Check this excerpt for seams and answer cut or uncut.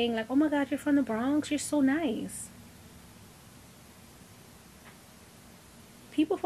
uncut